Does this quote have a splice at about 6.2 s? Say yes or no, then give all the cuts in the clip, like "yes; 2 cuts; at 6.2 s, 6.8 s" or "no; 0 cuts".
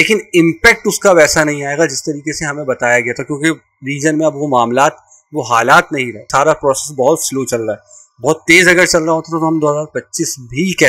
yes; 1 cut; at 6.2 s